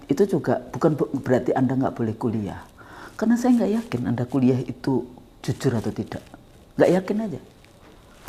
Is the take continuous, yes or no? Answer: yes